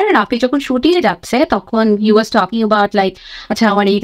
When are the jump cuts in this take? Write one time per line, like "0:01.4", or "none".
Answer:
none